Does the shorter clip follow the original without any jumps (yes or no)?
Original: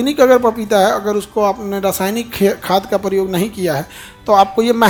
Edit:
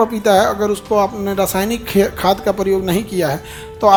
yes